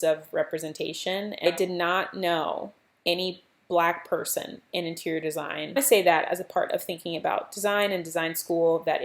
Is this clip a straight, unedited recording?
no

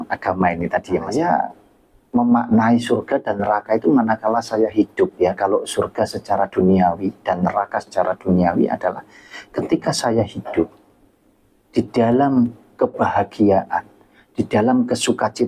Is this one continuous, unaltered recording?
no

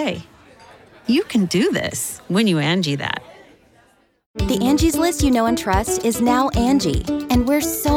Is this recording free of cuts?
no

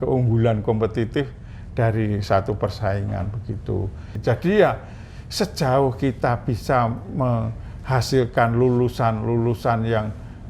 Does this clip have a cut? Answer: yes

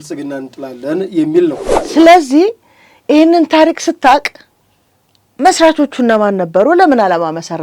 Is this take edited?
yes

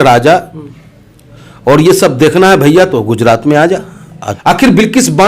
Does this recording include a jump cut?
yes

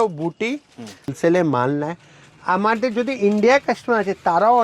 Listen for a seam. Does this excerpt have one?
yes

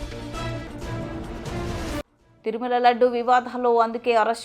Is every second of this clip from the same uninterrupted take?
no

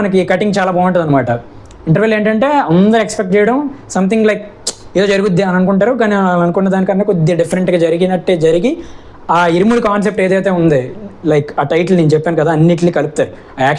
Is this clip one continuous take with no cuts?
yes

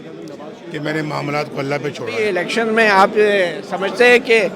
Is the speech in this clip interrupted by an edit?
yes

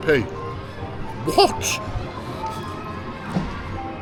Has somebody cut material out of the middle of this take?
no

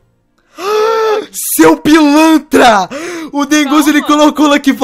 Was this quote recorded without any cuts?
yes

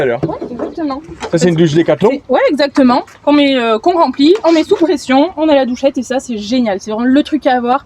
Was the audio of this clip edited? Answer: no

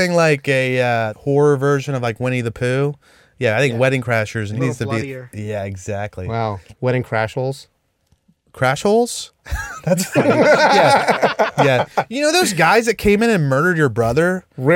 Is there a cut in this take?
yes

